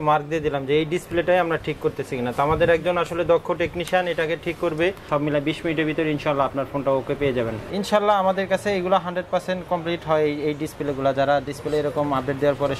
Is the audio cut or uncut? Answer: cut